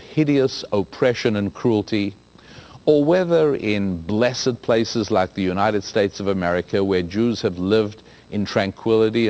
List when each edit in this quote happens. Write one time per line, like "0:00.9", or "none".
0:06.6